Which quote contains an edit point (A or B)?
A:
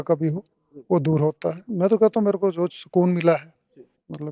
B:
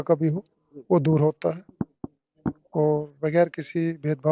A